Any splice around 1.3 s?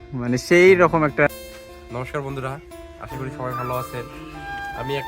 yes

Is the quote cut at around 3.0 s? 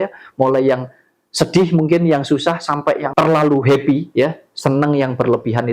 yes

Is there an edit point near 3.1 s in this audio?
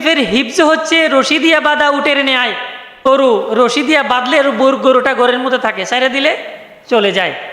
yes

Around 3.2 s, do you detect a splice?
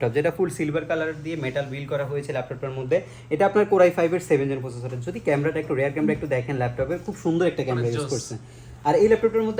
no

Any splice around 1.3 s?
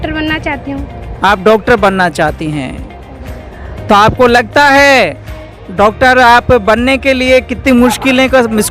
no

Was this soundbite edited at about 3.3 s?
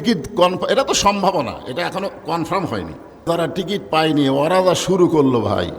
yes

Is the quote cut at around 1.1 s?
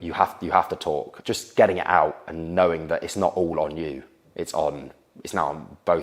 yes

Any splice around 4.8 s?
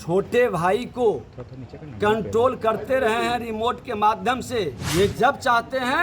yes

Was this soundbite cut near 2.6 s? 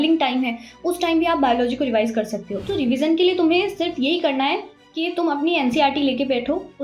yes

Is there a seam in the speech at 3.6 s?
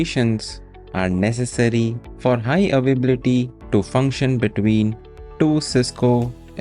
yes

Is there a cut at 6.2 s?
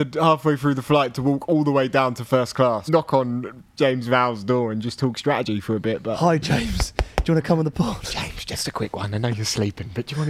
yes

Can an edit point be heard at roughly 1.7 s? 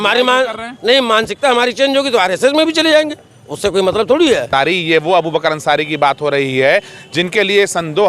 no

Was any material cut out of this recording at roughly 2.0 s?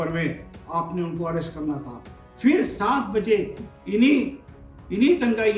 no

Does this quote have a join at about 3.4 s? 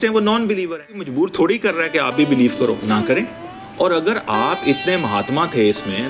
no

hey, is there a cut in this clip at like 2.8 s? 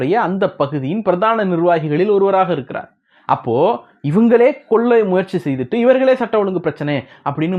no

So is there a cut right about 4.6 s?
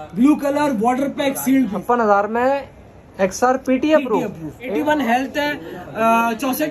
yes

